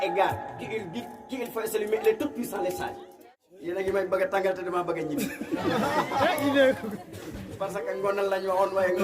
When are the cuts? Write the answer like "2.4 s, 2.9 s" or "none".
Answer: 3.1 s